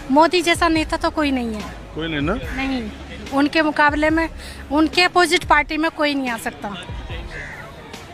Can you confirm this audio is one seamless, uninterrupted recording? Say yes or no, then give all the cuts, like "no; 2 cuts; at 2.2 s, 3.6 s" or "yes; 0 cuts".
yes; 0 cuts